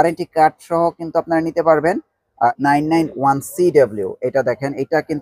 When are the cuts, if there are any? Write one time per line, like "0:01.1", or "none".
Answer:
0:02.5